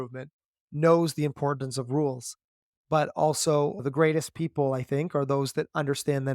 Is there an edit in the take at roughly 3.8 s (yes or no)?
yes